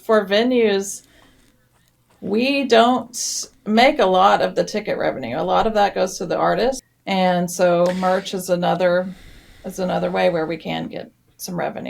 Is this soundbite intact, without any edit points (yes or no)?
no